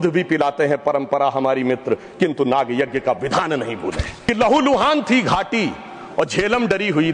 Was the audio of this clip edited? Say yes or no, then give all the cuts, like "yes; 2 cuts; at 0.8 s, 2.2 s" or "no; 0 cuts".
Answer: yes; 1 cut; at 4.1 s